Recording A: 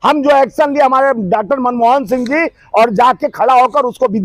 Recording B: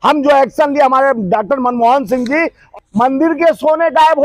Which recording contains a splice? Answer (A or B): B